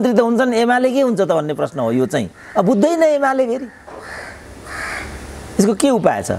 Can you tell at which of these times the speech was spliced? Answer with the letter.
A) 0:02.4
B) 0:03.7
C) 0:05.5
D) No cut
D